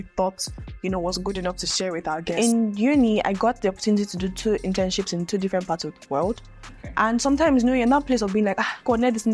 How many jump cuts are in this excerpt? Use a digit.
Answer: 1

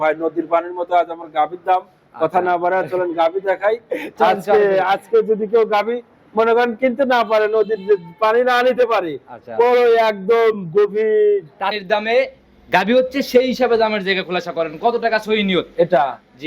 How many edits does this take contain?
1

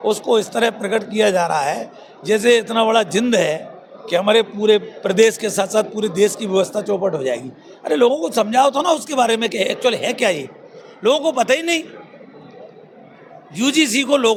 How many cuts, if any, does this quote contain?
0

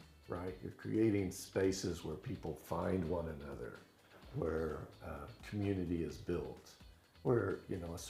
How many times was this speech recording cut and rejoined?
0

